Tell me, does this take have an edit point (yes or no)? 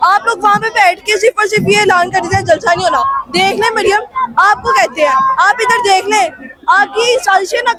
no